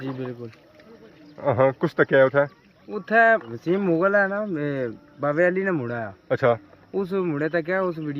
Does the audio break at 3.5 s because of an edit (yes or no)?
yes